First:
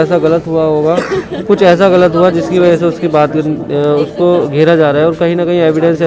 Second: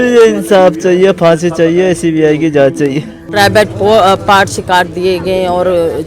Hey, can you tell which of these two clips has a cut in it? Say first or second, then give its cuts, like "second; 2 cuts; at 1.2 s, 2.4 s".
second; 1 cut; at 3.2 s